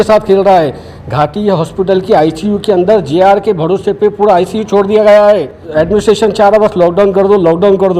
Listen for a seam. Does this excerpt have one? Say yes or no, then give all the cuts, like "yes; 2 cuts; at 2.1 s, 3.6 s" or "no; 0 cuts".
yes; 1 cut; at 5.6 s